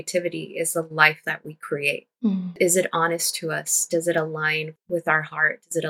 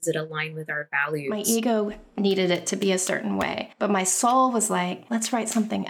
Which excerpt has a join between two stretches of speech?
second; 3 cuts; at 1.4 s, 3.6 s, 5.0 s

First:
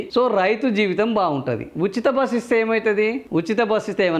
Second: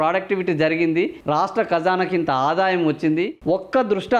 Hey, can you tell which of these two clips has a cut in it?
second; 2 cuts; at 1.2 s, 3.3 s

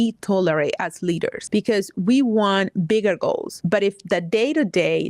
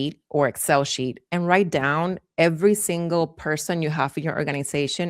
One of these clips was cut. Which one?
first; 2 cuts; at 1.4 s, 3.5 s

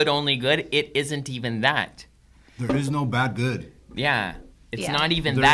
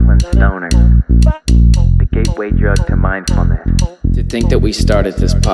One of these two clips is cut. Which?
second; 1 cut; at 4.3 s

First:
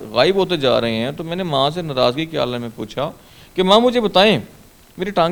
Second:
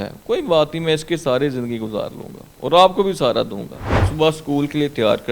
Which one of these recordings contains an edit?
second; 1 cut; at 4.0 s

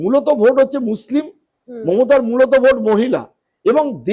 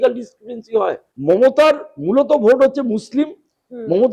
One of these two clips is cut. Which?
second; 1 cut; at 1.1 s

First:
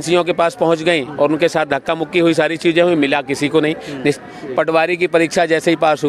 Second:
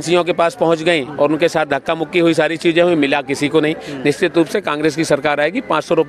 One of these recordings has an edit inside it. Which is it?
first; 1 cut; at 4.2 s

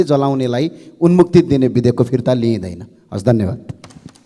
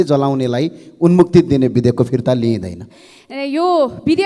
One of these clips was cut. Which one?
second; 1 cut; at 3.0 s

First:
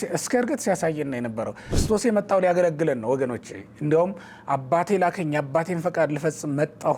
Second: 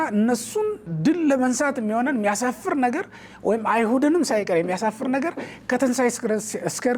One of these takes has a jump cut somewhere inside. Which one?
first; 1 cut; at 1.7 s

